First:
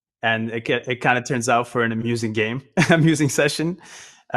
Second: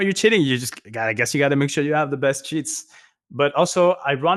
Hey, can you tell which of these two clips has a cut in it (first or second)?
first